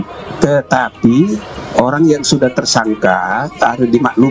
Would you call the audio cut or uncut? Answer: uncut